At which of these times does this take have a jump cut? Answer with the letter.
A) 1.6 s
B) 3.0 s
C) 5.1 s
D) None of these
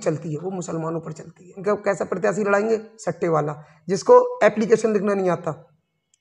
A